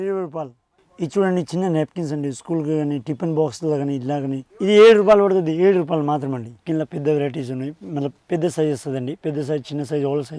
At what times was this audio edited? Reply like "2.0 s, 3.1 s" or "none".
4.5 s, 6.6 s

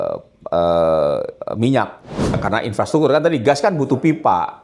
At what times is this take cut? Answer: 2.4 s

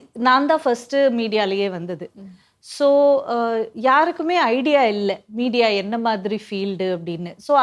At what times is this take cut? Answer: none

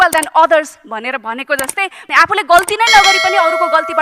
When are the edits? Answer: 2.1 s

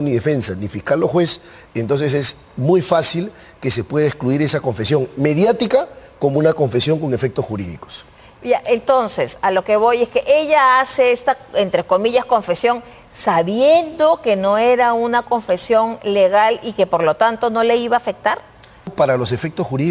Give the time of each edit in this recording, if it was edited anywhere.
18.9 s

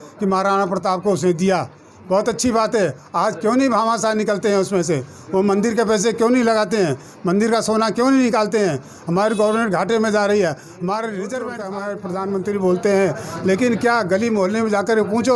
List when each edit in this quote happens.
11.5 s

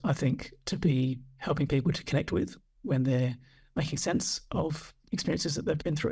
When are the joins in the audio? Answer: 1.3 s, 2.7 s, 4.9 s

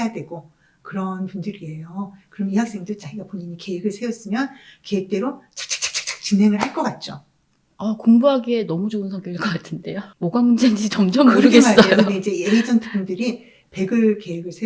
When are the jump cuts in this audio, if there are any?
10.1 s

